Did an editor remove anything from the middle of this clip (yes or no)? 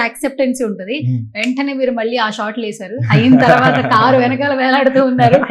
no